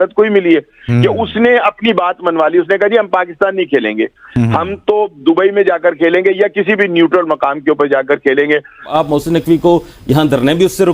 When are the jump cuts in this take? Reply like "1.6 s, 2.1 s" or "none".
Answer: 8.9 s